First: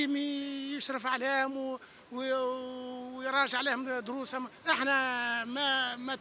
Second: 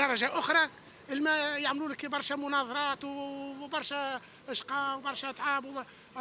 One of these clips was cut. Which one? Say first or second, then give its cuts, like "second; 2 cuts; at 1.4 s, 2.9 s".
first; 1 cut; at 4.6 s